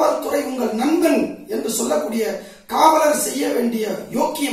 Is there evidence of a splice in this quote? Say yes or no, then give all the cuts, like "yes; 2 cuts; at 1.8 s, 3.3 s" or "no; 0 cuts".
no; 0 cuts